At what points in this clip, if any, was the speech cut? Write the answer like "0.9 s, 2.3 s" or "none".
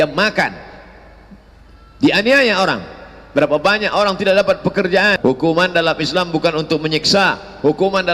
5.2 s